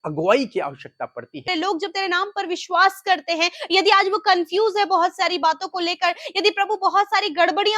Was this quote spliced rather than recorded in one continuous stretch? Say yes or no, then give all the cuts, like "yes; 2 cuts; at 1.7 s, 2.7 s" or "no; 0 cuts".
yes; 1 cut; at 1.4 s